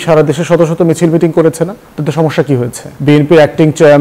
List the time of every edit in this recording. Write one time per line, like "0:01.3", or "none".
0:02.8